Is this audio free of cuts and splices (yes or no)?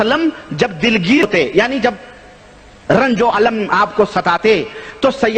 no